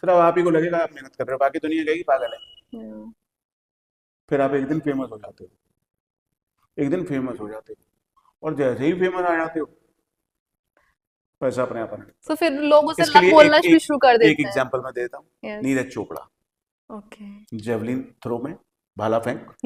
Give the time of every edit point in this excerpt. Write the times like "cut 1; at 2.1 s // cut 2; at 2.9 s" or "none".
none